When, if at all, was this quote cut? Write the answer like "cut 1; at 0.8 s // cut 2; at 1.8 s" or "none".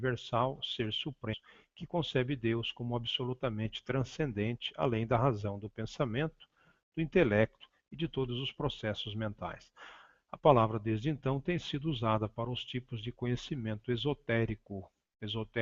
none